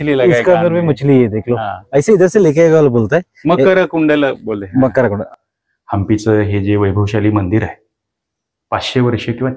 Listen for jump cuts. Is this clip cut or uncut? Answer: cut